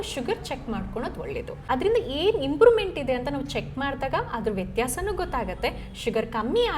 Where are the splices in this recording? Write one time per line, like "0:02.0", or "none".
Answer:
0:01.5